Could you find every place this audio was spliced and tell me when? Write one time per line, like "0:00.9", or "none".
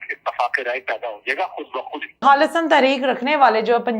0:02.2